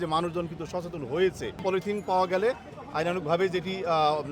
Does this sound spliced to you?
yes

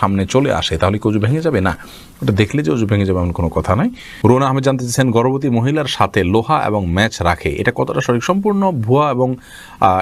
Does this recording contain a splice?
no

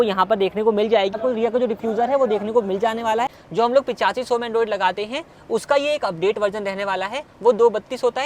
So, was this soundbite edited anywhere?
yes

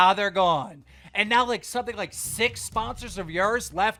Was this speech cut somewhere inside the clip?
no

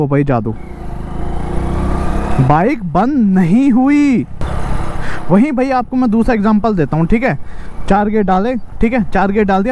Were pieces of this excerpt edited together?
no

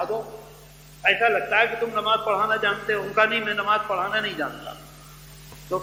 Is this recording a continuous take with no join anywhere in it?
yes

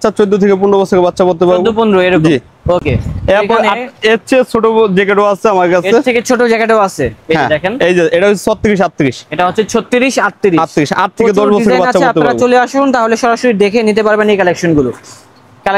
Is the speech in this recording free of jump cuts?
yes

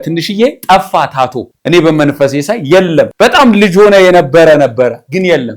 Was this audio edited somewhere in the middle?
no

